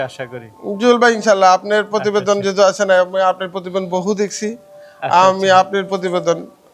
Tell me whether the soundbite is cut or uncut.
uncut